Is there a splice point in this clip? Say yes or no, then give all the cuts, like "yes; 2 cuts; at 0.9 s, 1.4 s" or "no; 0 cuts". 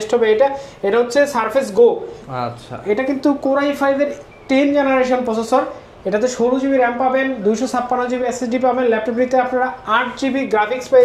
no; 0 cuts